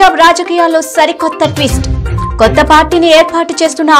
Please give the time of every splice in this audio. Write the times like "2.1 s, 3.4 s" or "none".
none